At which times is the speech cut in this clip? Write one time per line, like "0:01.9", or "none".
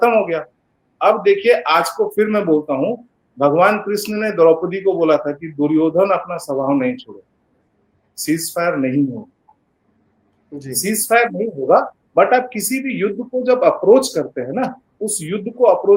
none

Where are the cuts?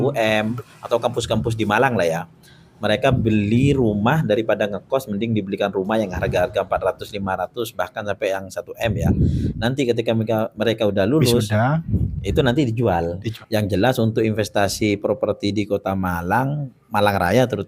0:13.3

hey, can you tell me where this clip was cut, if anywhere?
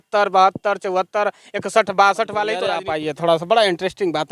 0:02.7

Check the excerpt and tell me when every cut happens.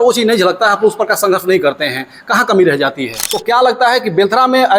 0:03.3

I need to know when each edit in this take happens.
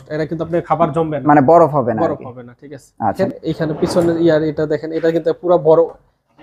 0:03.2

